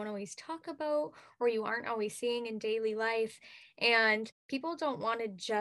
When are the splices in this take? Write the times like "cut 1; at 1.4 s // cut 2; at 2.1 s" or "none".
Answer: cut 1; at 4.4 s

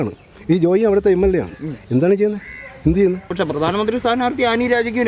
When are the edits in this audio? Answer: cut 1; at 3.3 s

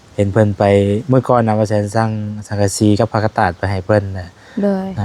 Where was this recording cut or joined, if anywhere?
none

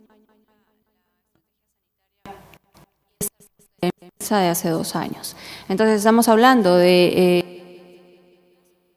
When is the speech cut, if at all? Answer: none

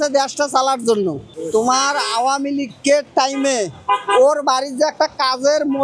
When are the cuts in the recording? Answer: cut 1; at 1.4 s

